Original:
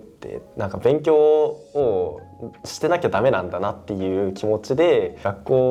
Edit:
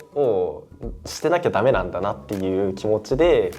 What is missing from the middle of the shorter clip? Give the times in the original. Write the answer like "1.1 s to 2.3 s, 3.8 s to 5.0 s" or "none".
none